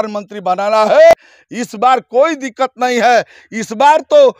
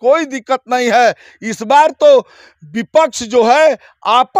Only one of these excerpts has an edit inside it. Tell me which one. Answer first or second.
first